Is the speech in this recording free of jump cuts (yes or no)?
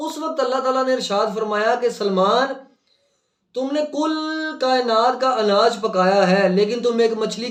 yes